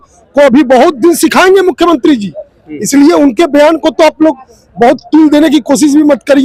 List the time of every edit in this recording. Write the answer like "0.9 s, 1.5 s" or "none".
none